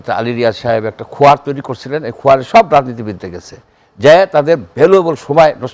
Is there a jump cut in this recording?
no; 0 cuts

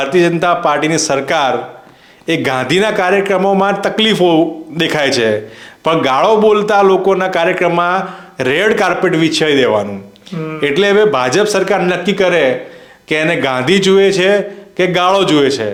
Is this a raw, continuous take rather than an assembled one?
yes; 0 cuts

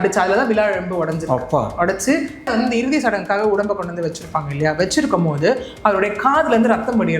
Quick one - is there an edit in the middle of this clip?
yes; 1 cut; at 2.5 s

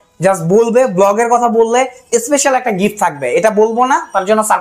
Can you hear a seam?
no; 0 cuts

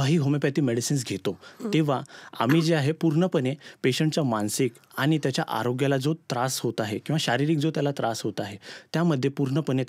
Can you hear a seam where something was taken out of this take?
no; 0 cuts

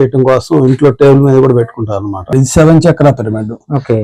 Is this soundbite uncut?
no; 1 cut; at 2.3 s

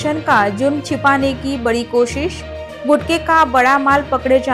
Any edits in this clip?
no; 0 cuts

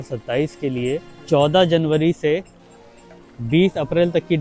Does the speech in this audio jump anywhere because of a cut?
yes; 1 cut; at 1.1 s

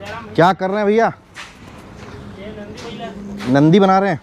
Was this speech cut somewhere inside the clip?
no; 0 cuts

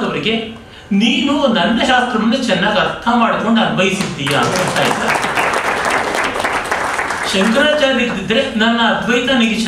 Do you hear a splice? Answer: no; 0 cuts

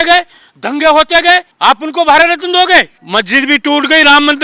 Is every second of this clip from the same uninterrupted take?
no; 2 cuts; at 1.5 s, 3.0 s

